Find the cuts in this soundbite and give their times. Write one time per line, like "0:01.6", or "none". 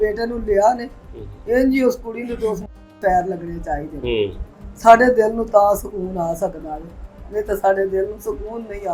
none